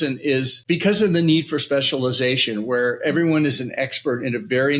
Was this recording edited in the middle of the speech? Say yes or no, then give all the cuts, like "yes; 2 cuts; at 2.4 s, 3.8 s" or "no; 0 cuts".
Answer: no; 0 cuts